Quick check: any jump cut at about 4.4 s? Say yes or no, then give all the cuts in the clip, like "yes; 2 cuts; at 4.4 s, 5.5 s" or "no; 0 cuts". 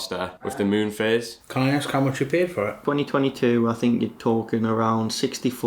no; 2 cuts; at 1.4 s, 2.8 s